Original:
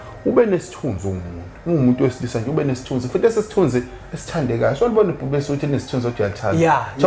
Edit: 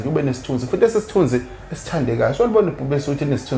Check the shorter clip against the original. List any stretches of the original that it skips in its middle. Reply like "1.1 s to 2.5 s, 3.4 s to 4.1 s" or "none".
none